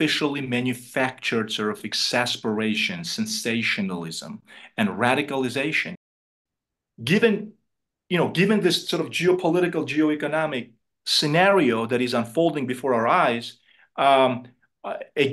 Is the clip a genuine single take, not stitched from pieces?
no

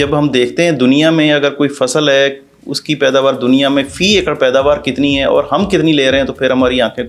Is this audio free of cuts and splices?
yes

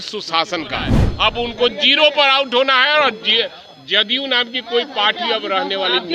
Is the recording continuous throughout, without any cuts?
no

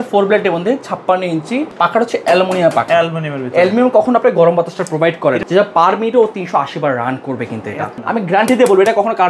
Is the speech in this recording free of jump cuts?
no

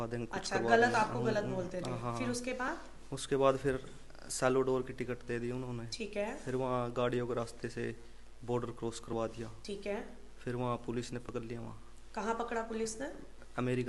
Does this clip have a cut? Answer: no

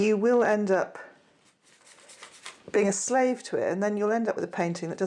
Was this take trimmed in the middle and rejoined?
no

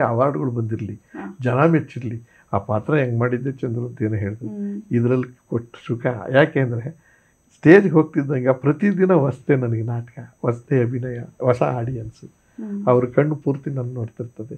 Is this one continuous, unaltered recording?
yes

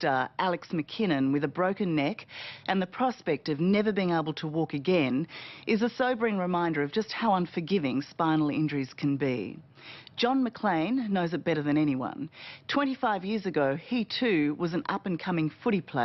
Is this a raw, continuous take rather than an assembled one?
yes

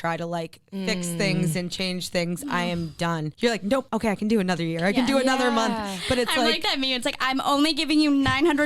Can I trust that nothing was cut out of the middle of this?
no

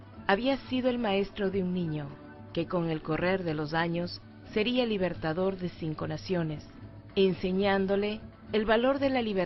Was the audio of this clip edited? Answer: yes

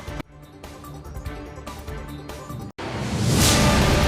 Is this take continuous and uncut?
no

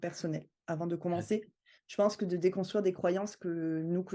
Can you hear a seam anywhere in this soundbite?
no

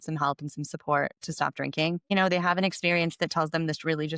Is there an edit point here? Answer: yes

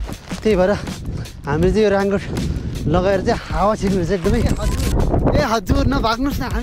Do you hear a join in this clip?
yes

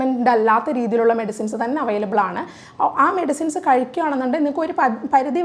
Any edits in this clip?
no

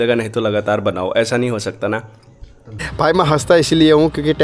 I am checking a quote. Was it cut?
yes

